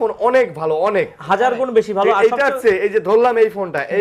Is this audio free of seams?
yes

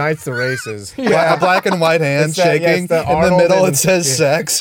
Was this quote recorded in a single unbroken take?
no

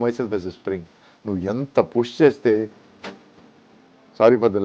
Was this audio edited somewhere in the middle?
no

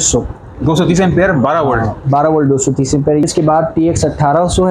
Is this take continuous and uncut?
no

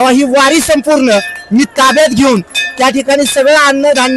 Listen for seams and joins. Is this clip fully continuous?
yes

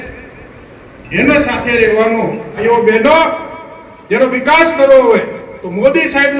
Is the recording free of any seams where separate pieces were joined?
no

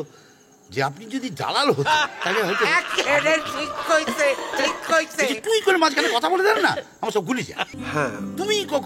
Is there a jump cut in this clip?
yes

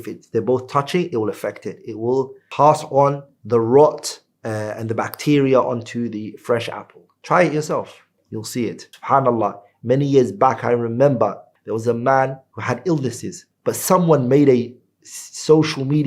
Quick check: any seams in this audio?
yes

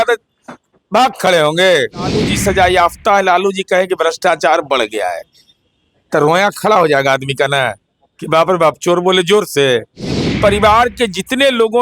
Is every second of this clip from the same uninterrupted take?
no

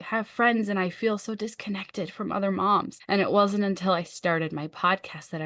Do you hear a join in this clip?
yes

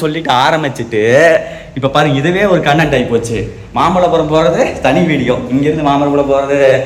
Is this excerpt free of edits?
yes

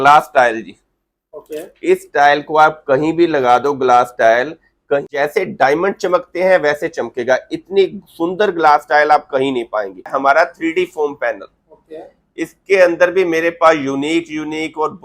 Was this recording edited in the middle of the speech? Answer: yes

